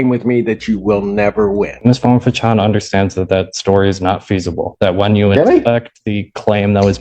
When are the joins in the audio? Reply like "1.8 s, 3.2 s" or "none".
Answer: 1.7 s